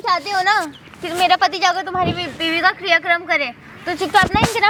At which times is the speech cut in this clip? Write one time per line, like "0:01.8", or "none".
none